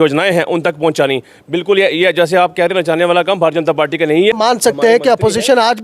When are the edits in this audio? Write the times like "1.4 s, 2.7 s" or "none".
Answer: 4.3 s